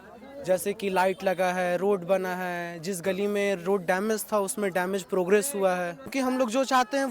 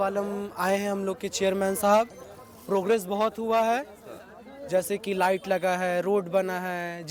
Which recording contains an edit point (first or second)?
first